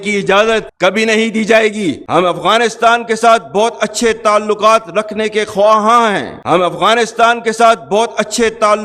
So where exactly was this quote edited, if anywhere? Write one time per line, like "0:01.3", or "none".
0:02.0
0:06.3